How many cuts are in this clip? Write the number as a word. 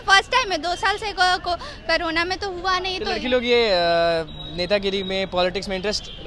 zero